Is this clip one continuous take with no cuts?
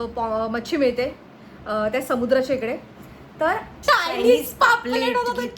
no; 1 cut; at 3.7 s

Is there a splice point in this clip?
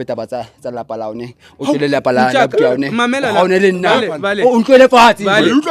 no; 0 cuts

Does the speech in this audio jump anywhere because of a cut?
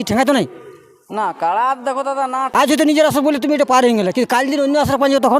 yes; 1 cut; at 2.5 s

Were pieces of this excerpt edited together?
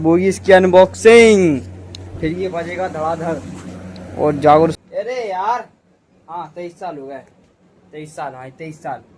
yes; 1 cut; at 4.8 s

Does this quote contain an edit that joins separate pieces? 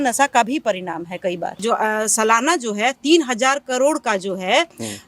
yes; 1 cut; at 1.6 s

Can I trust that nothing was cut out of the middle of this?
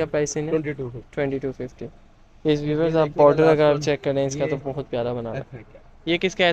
yes; 0 cuts

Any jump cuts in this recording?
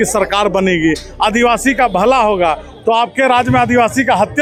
no; 0 cuts

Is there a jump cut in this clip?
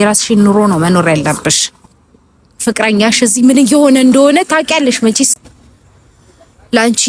no; 0 cuts

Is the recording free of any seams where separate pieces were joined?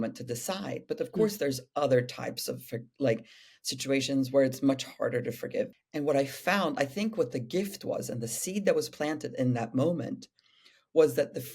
no; 1 cut; at 5.7 s

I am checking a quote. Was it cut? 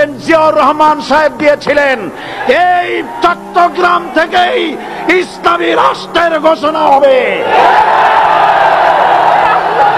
no; 0 cuts

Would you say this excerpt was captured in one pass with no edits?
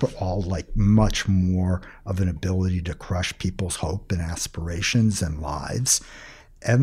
yes; 0 cuts

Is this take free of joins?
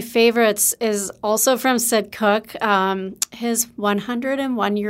yes; 0 cuts

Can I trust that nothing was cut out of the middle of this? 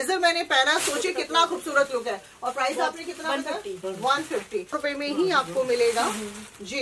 no; 1 cut; at 4.8 s

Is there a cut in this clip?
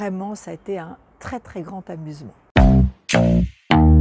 yes; 1 cut; at 2.3 s

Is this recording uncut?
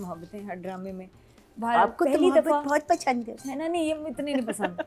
yes; 0 cuts

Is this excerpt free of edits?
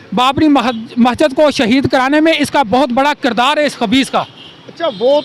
yes; 0 cuts

